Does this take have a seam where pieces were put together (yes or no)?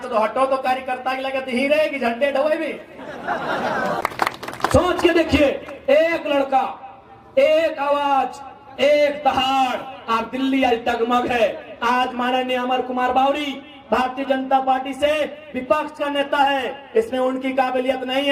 no